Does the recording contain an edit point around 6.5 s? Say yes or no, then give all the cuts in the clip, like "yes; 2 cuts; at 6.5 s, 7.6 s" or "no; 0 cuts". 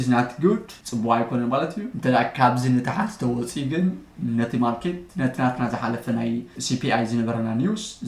yes; 2 cuts; at 1.9 s, 6.5 s